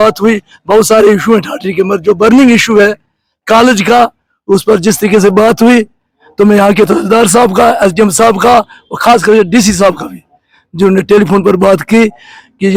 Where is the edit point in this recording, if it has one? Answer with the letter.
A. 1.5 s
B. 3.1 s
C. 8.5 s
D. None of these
D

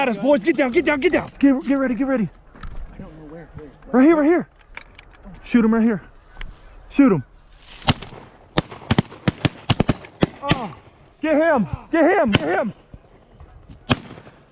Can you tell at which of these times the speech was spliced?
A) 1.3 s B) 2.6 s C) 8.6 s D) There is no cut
A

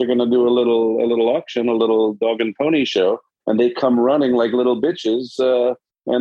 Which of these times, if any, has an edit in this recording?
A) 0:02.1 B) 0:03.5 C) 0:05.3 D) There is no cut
D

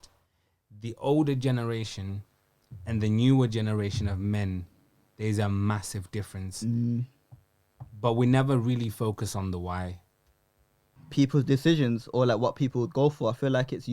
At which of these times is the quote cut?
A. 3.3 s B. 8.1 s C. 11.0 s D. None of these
C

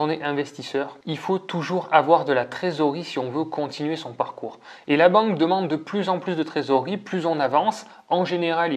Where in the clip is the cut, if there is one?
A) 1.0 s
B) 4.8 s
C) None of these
A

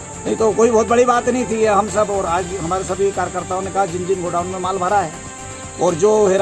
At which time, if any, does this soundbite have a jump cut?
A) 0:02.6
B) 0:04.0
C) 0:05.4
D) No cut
D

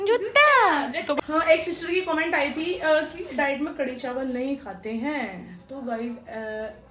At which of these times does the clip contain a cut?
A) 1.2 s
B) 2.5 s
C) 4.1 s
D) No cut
A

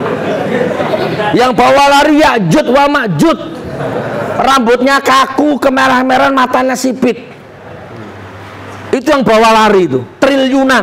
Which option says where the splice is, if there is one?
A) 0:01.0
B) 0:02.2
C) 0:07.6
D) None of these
D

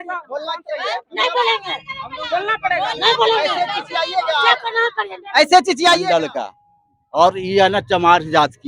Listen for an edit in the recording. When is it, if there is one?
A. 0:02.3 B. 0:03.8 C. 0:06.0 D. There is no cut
C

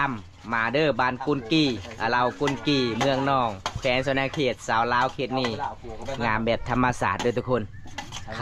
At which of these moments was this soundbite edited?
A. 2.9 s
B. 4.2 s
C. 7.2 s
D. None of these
D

